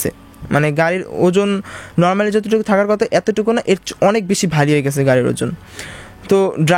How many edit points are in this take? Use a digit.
0